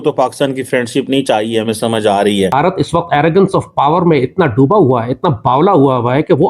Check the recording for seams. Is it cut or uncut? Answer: cut